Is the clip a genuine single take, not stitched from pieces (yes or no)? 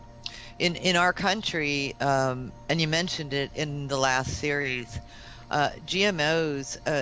no